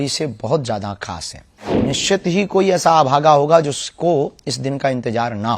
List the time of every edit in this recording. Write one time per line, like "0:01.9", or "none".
0:01.8